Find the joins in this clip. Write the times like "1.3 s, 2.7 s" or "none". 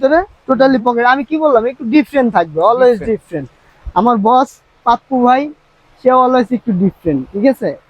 none

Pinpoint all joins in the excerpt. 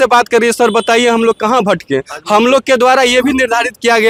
none

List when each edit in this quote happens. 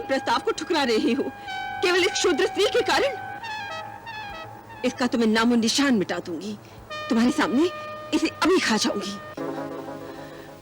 9.3 s

